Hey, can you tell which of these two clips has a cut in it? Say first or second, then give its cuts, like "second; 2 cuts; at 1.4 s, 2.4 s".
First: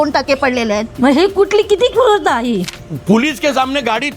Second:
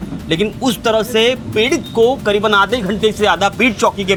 first; 1 cut; at 2.8 s